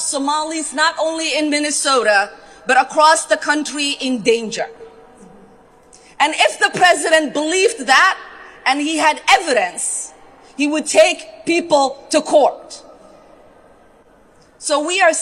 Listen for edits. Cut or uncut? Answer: uncut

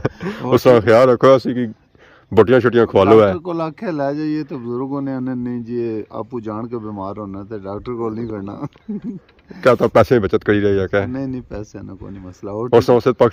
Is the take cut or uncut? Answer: uncut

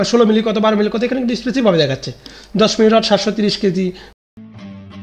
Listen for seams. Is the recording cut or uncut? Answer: cut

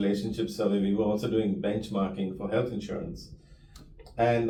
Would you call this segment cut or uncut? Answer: uncut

